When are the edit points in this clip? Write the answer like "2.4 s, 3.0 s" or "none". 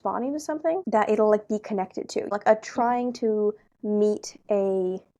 0.8 s, 2.3 s